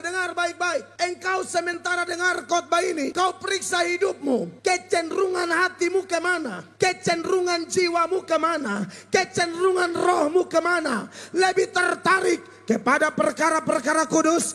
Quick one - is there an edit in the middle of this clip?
yes; 4 cuts; at 0.9 s, 3.1 s, 4.5 s, 6.6 s

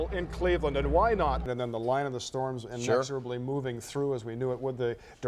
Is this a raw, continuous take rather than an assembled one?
no; 1 cut; at 1.5 s

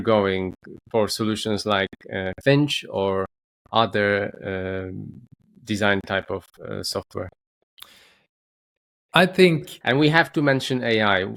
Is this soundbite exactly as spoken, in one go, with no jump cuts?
yes; 0 cuts

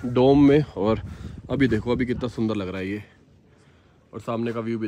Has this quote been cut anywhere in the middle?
no; 0 cuts

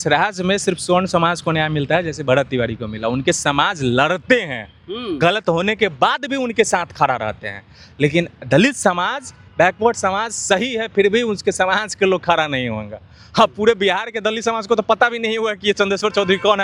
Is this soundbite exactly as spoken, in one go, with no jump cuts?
yes; 0 cuts

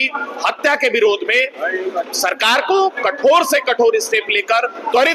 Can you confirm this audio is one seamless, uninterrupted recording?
yes; 0 cuts

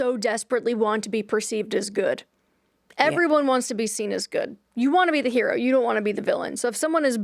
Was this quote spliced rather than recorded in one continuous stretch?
no; 0 cuts

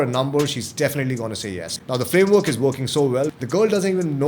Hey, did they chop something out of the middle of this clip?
yes; 2 cuts; at 1.6 s, 3.3 s

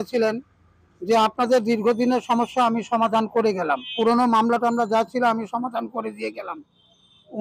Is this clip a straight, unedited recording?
no; 1 cut; at 3.9 s

